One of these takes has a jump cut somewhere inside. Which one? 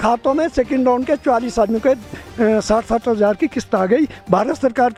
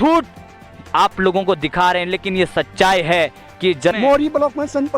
second; 1 cut; at 4.0 s

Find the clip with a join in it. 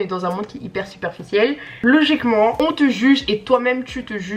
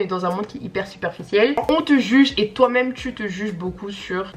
second; 1 cut; at 1.6 s

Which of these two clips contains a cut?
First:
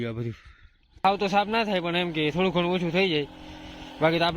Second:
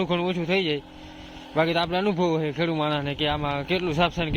first; 1 cut; at 1.0 s

